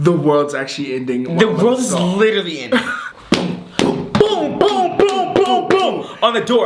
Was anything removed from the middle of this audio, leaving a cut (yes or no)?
yes